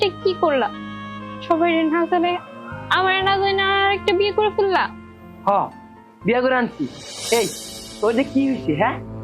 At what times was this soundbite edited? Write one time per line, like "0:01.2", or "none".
none

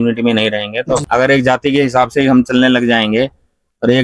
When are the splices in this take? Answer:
0:01.0

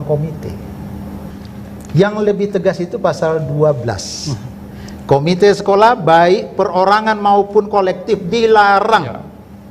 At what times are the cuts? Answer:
0:01.3

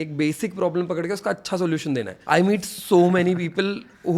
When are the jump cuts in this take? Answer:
0:02.1

